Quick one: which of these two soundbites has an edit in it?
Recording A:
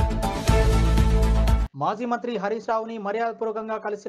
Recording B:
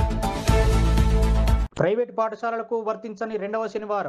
A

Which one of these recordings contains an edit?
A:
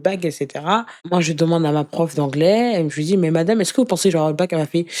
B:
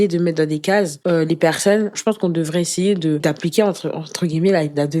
B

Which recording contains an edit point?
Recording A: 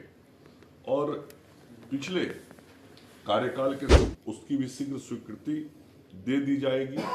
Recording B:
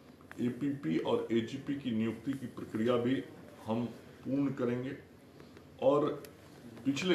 A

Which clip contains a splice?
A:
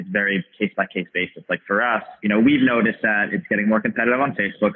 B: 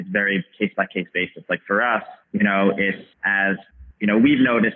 A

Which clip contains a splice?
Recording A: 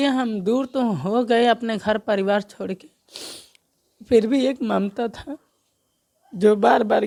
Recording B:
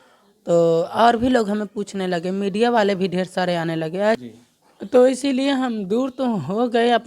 B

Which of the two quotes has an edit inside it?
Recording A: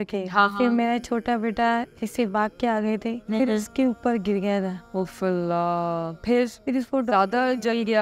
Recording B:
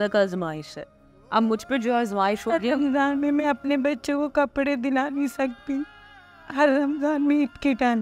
A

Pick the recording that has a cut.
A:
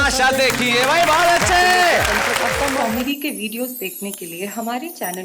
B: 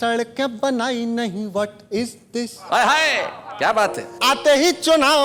A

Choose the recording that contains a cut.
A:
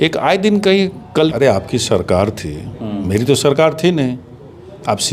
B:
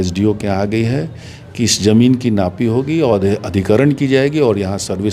A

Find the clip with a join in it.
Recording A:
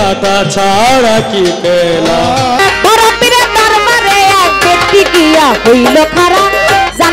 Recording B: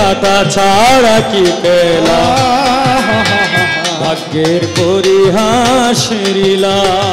A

